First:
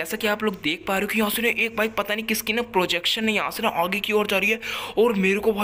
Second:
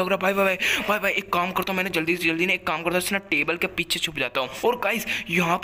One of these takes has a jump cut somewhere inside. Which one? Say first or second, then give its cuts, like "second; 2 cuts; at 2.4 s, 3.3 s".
second; 1 cut; at 4.5 s